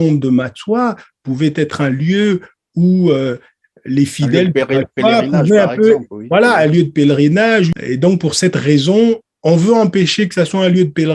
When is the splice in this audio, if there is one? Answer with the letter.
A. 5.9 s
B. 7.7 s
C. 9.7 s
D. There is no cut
B